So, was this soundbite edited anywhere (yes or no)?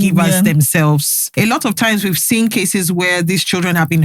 yes